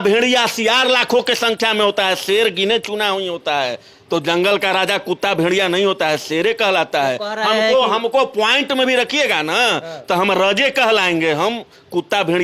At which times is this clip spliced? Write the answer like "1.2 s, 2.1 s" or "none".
none